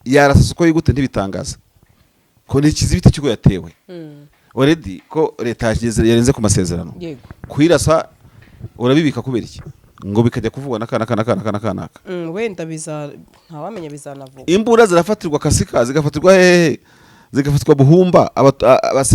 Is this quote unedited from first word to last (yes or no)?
yes